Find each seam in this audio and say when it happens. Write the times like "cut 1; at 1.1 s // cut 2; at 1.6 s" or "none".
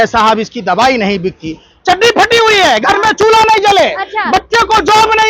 none